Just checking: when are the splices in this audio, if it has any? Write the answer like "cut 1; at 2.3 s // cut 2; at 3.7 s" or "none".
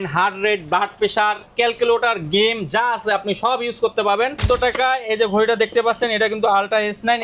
cut 1; at 4.4 s